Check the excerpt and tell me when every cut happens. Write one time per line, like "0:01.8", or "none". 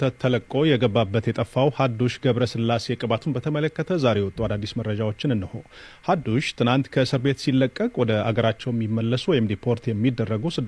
none